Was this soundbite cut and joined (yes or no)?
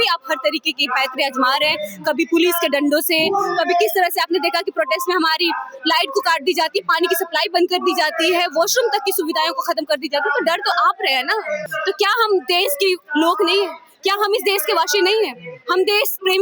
yes